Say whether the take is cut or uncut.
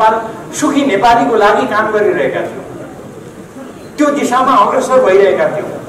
uncut